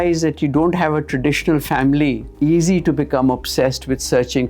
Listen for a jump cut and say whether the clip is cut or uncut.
cut